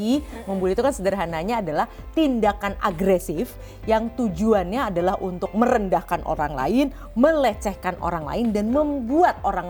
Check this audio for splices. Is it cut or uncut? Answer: uncut